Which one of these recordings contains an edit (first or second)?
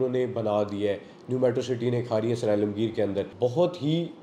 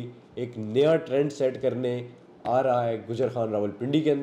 first